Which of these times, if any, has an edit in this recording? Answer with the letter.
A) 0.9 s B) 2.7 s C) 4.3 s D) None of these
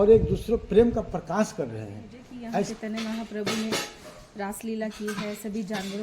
B